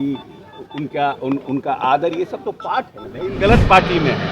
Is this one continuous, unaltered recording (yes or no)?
no